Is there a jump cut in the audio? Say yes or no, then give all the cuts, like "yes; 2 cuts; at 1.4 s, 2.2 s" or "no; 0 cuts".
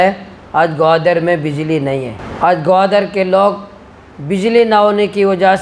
yes; 1 cut; at 2.2 s